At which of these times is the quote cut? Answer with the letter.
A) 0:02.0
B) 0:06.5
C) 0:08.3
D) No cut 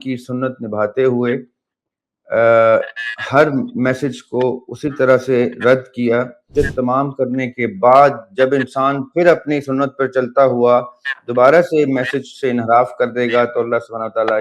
B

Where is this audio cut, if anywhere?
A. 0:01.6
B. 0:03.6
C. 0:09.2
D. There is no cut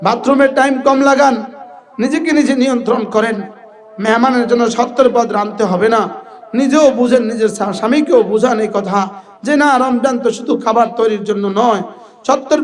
D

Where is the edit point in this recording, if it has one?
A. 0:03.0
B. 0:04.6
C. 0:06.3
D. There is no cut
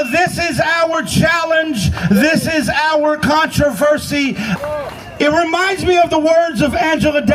B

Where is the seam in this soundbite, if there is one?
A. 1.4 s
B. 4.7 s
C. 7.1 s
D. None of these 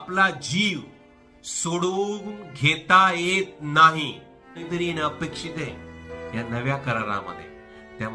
B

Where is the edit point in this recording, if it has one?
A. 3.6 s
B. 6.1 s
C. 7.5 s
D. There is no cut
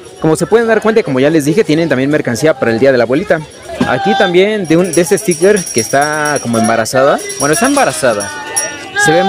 A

